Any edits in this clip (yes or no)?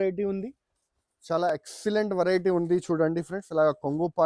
no